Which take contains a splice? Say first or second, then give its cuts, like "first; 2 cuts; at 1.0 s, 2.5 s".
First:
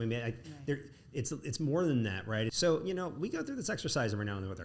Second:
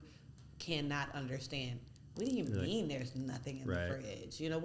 first; 1 cut; at 2.5 s